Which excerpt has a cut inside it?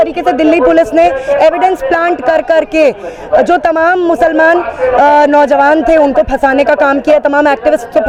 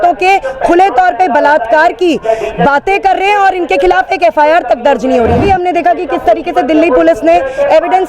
second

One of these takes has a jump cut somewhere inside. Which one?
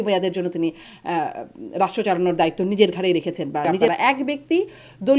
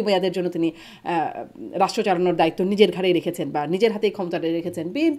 first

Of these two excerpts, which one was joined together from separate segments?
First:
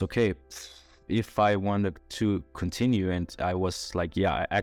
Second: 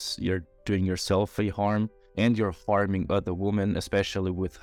second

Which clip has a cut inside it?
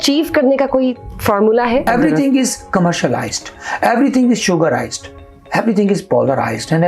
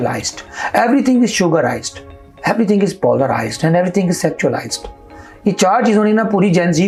first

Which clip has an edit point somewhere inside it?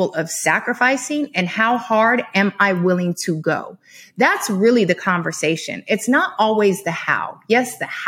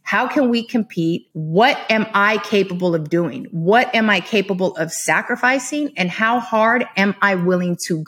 second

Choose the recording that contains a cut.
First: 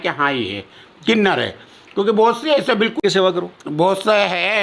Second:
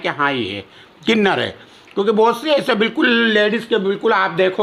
first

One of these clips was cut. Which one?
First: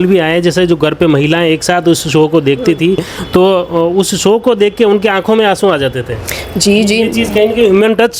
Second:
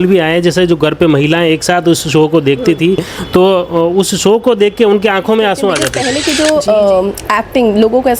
second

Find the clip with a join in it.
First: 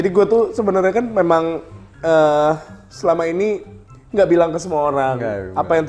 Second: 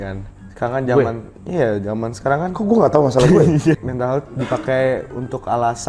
second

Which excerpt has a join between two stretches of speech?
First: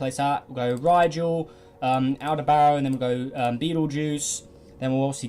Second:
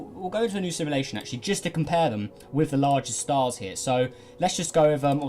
second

